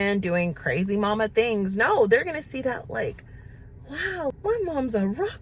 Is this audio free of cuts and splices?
no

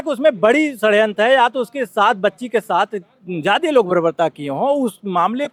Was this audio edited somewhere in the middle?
no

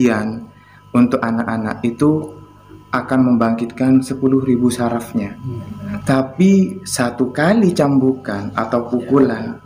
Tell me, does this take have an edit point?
yes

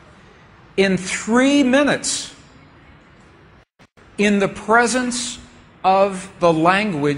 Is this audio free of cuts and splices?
yes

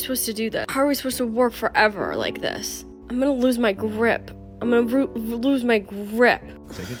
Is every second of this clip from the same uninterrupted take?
yes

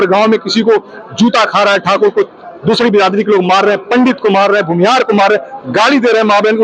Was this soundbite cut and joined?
no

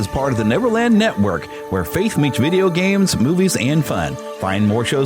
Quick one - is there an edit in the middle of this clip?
no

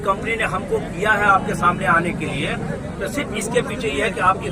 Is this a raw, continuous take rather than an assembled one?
yes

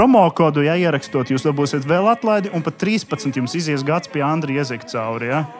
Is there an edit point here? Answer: no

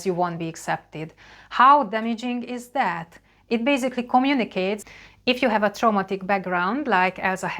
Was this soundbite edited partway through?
yes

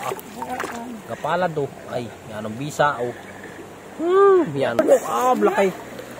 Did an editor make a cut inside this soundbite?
yes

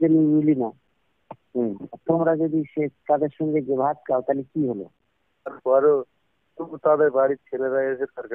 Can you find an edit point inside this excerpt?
yes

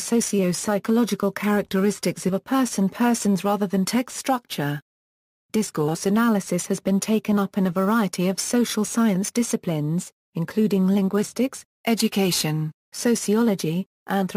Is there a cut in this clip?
yes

